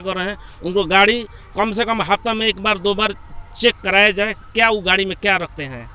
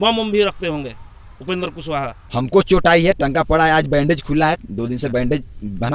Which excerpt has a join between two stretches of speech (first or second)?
second